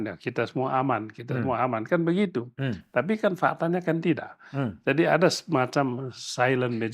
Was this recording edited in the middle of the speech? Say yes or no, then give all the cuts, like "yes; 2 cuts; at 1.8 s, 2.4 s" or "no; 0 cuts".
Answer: no; 0 cuts